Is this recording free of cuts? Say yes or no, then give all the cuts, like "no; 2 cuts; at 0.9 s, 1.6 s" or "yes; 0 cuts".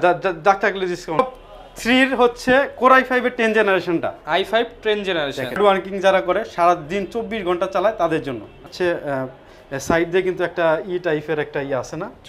no; 3 cuts; at 1.2 s, 5.6 s, 8.7 s